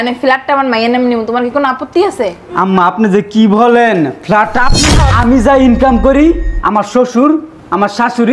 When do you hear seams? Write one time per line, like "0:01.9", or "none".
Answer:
0:04.9